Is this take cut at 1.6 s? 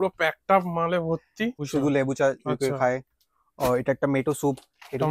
yes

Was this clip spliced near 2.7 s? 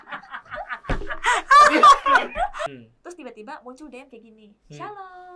yes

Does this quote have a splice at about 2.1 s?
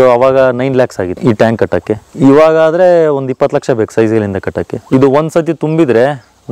yes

